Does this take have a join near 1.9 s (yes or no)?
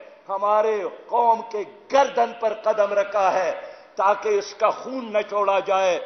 no